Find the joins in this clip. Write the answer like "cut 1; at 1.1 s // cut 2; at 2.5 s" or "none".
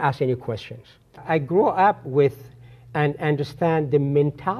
cut 1; at 1.2 s